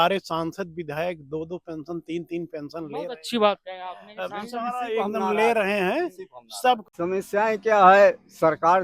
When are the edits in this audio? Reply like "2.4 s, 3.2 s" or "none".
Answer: 6.9 s